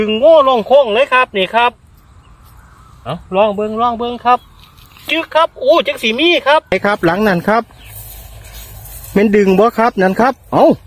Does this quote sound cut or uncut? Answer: cut